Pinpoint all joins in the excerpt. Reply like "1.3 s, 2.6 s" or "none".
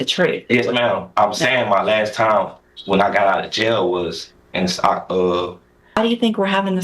5.7 s